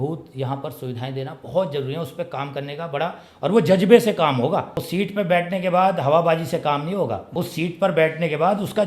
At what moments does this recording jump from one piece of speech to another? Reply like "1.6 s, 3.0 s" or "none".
4.8 s, 7.3 s